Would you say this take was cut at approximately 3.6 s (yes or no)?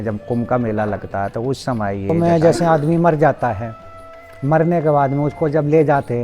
no